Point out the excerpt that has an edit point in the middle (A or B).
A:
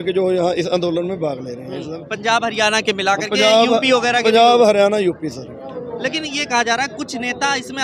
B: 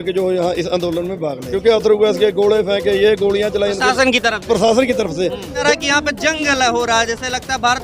B